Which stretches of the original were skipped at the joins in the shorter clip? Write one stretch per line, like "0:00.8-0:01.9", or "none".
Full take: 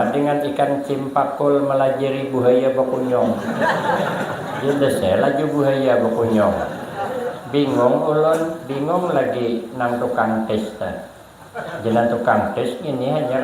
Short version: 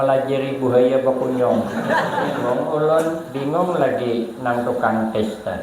0:04.1-0:07.7

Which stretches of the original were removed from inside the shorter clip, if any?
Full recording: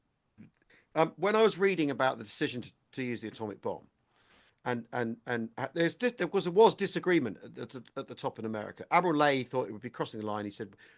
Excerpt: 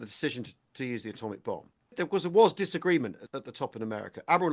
0:04.1-0:06.1
0:07.5-0:07.9

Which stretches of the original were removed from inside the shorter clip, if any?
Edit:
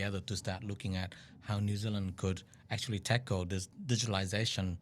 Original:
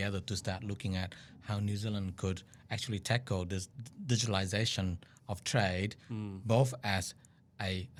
0:03.7-0:03.9

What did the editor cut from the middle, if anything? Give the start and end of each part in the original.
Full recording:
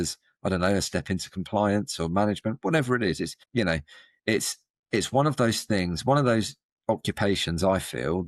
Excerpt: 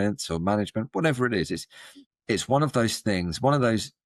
0:03.5-0:04.4

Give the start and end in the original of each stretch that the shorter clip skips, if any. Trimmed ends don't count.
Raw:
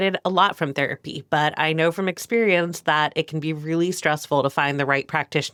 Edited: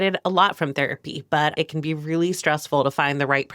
0:01.5-0:03.1

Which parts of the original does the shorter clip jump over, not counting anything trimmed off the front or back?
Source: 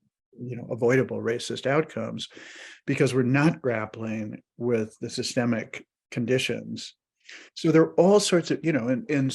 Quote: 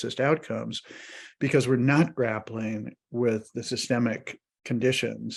none

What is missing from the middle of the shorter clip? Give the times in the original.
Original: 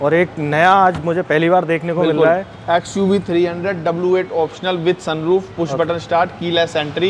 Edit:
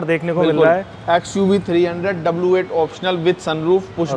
none

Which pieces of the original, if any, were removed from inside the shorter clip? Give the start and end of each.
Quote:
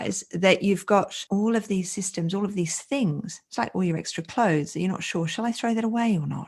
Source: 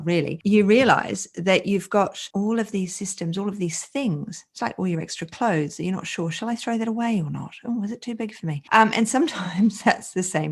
none

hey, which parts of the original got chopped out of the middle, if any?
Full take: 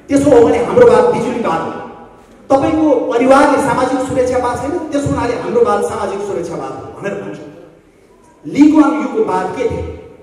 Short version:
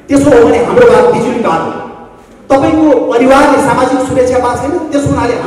none

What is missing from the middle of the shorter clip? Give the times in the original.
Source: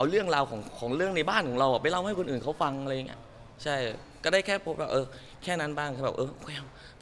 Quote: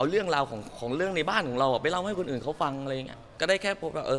0:03.2-0:04.1

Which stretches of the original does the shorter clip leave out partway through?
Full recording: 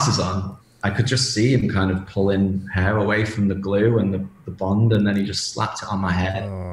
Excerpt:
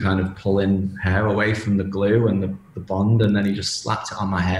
none

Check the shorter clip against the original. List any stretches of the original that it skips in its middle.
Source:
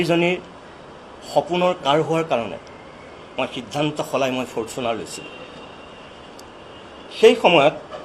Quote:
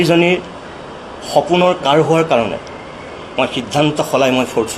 none

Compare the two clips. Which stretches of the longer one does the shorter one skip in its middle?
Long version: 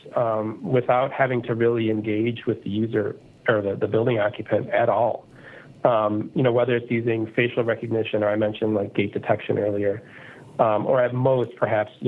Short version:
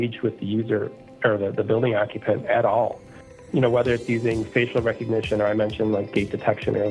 0:05.7-0:06.3

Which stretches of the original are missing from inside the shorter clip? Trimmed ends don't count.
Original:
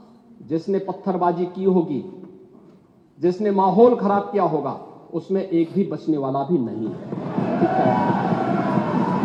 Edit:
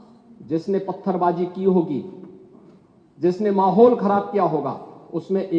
none

